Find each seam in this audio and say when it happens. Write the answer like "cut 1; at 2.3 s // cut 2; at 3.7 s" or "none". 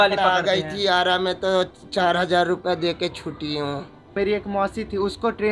cut 1; at 4.1 s